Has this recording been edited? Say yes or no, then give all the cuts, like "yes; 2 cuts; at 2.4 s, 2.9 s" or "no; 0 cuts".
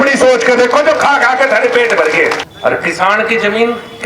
yes; 1 cut; at 2.4 s